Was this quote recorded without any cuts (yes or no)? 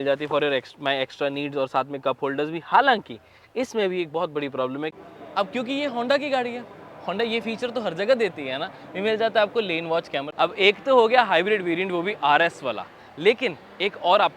no